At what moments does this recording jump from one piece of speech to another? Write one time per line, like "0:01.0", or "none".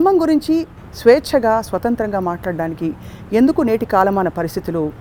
none